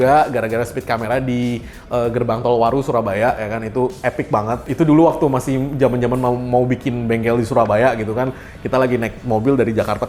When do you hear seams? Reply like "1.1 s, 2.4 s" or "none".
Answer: none